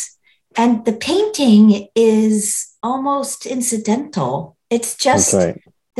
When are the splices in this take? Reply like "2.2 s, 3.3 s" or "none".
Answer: none